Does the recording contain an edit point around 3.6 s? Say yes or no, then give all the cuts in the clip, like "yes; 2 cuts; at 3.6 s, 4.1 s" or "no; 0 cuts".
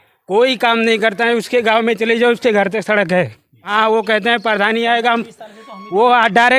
yes; 1 cut; at 3.6 s